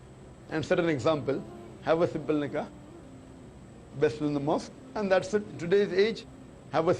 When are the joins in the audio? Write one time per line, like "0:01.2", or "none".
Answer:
0:05.5

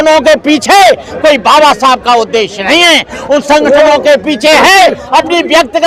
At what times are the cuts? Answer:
none

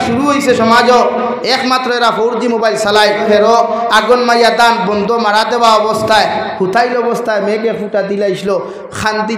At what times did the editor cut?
0:03.2

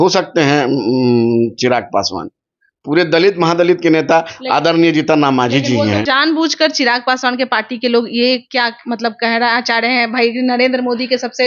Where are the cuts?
0:06.0

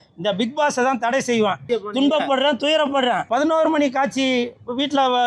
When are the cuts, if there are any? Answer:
0:01.7
0:03.3

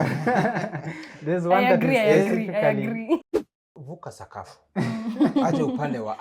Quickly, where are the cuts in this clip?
0:03.2

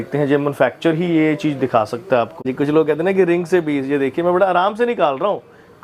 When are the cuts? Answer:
0:02.4

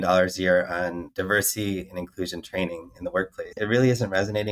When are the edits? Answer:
0:01.1
0:03.6

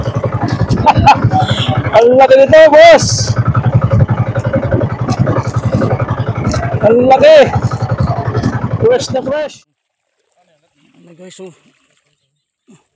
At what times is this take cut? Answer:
0:09.4

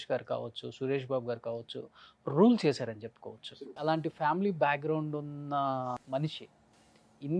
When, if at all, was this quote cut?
0:03.7
0:06.0

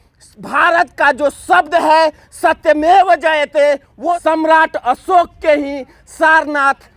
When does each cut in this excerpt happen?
0:04.1

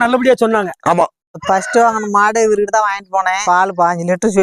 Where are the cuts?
0:01.4

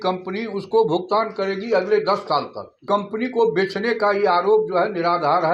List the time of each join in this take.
0:02.8

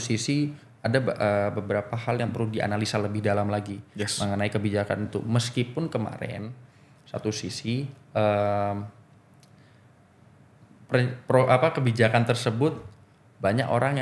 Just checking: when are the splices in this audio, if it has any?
none

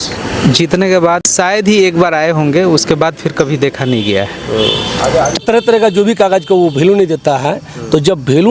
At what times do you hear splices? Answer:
0:01.3
0:05.4

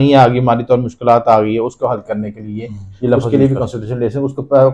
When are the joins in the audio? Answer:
0:03.2

